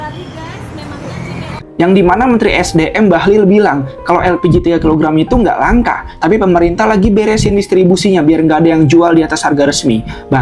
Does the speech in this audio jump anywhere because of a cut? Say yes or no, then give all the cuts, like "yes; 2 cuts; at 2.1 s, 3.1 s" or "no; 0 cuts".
yes; 1 cut; at 1.6 s